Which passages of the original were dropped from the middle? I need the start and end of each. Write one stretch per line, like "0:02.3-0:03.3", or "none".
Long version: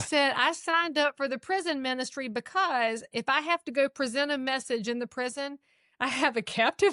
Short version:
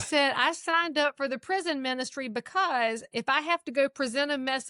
none